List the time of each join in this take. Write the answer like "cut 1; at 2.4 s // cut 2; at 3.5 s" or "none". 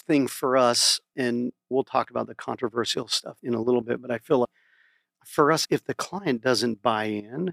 cut 1; at 1.2 s // cut 2; at 3.2 s // cut 3; at 4.5 s